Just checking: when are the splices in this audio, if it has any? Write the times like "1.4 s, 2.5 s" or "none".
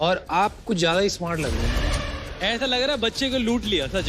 1.9 s